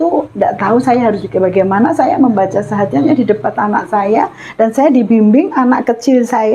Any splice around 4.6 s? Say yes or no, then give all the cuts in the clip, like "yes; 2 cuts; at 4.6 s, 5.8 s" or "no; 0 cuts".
no; 0 cuts